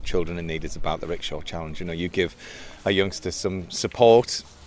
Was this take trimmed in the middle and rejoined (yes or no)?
no